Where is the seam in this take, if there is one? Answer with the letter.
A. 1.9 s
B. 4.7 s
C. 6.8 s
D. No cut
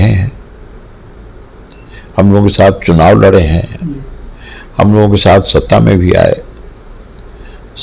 D